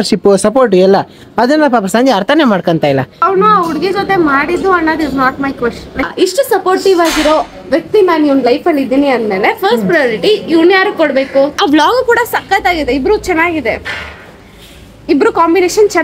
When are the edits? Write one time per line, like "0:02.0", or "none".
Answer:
0:03.2
0:06.1
0:11.5